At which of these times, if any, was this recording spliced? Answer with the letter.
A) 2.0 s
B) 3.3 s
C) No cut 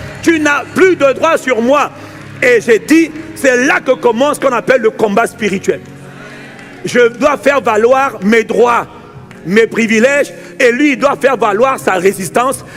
C